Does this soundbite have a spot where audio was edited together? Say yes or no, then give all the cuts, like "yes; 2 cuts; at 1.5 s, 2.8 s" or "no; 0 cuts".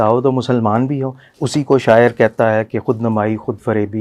yes; 1 cut; at 1.2 s